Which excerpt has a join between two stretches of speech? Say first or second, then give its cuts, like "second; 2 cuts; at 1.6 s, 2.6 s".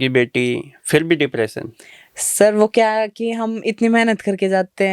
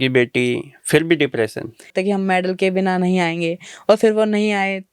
second; 1 cut; at 1.9 s